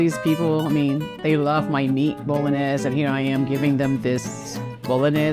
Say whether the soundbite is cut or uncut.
uncut